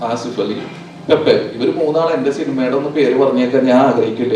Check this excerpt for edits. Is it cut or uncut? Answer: uncut